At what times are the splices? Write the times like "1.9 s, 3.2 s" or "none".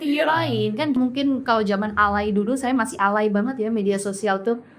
1.0 s